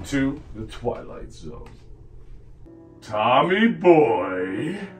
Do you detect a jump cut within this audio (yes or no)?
yes